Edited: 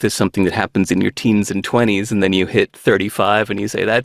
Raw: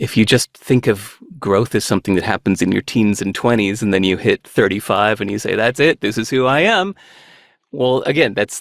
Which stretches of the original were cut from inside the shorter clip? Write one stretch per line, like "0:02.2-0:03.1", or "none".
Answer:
none